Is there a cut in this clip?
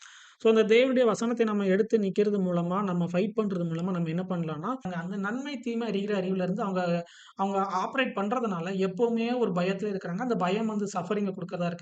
yes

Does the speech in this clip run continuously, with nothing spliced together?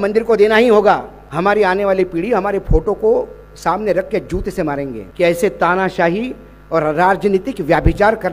no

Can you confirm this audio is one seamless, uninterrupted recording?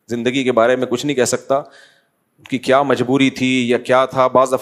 yes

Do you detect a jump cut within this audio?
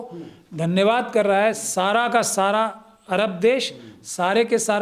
no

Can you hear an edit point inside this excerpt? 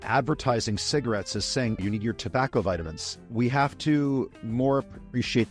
yes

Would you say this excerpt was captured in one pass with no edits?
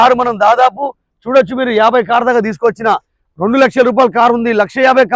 yes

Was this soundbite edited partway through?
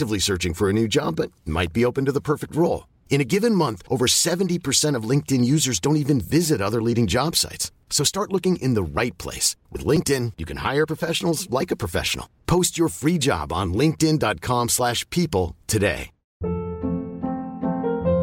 yes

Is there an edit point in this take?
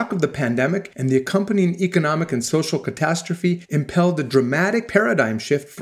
yes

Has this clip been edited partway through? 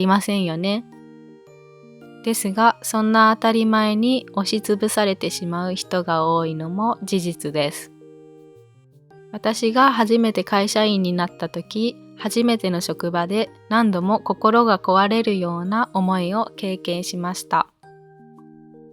yes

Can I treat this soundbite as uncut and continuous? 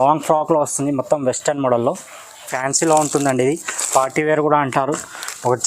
no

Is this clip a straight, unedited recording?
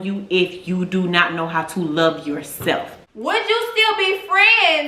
no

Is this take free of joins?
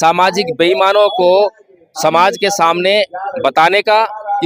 yes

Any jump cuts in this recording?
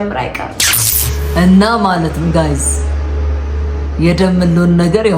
yes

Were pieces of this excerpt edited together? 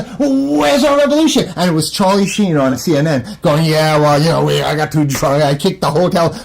yes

